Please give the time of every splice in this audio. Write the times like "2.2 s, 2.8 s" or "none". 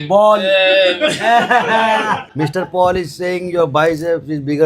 2.3 s